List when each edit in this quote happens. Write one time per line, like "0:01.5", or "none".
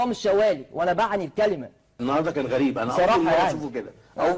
0:01.9

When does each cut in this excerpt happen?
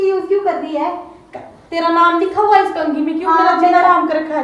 none

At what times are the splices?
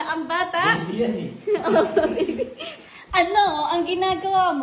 none

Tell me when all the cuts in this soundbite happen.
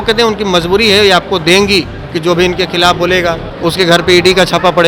0:02.0
0:03.5

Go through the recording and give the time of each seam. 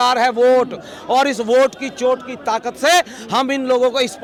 none

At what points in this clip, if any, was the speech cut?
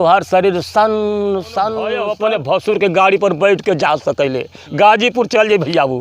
0:02.1

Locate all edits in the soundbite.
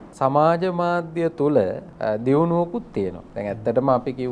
0:01.9
0:03.3

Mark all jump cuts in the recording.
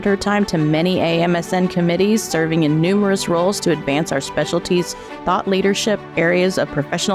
0:06.1

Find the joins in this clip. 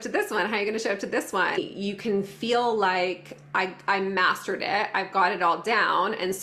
0:01.6

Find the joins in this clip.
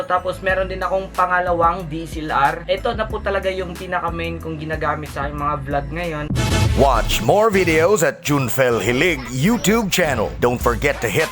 0:02.6
0:06.6

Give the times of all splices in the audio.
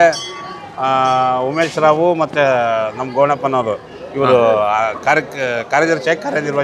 none

